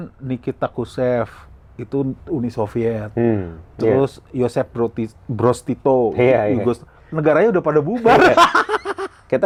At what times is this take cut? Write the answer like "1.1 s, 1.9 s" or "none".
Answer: none